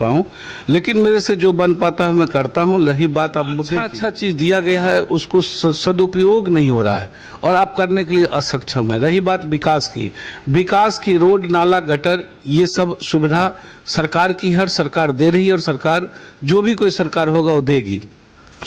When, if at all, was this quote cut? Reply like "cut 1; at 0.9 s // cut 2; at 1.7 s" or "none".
cut 1; at 3.9 s